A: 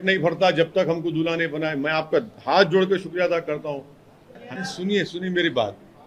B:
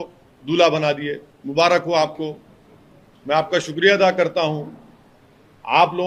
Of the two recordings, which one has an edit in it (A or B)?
A